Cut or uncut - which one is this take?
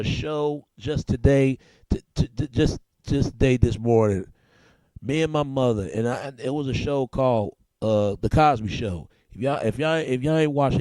cut